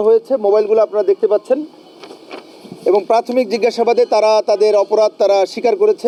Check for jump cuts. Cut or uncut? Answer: uncut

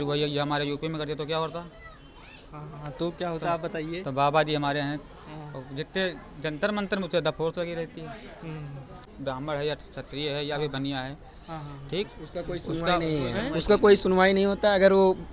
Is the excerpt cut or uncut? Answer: cut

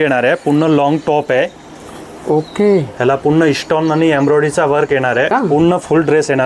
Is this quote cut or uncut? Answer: cut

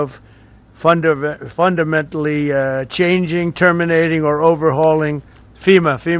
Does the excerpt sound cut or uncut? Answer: uncut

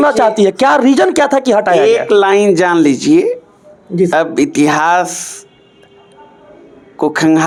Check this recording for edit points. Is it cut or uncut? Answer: uncut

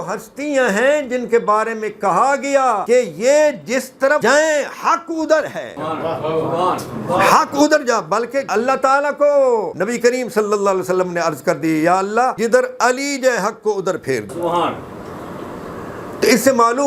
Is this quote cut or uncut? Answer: cut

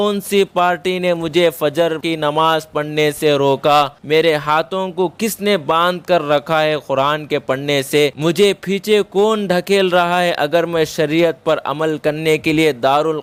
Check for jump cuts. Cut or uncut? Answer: uncut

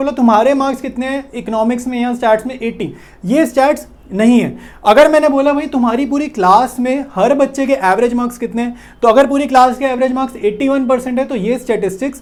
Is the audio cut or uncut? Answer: uncut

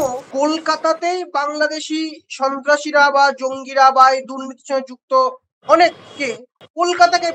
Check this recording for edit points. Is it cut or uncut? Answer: uncut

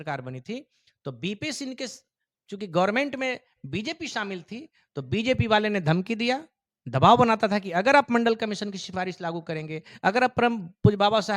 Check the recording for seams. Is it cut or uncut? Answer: uncut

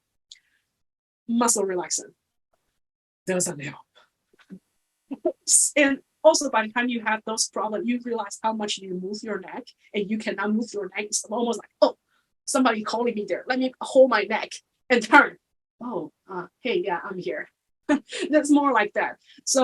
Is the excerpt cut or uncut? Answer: uncut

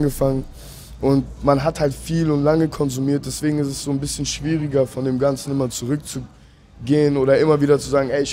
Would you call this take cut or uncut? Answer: uncut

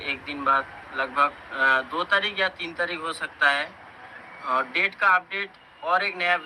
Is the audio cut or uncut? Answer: uncut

